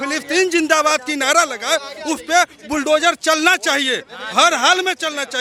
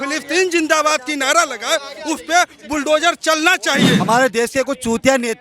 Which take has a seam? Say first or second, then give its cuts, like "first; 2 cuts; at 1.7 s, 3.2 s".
second; 1 cut; at 4.0 s